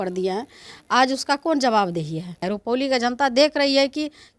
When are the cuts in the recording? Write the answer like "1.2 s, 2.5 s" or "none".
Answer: 2.4 s